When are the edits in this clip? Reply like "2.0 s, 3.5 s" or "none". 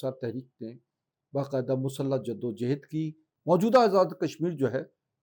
3.3 s